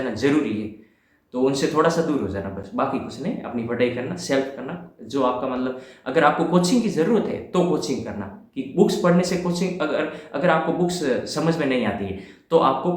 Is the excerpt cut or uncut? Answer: uncut